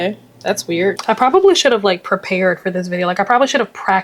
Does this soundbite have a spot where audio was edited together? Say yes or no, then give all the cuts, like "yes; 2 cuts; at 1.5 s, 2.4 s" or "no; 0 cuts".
yes; 1 cut; at 0.9 s